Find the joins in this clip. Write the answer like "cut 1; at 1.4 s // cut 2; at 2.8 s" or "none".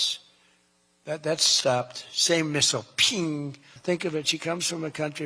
cut 1; at 3.7 s